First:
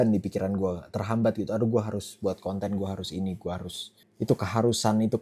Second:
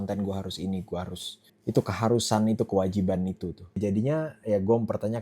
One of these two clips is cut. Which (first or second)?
second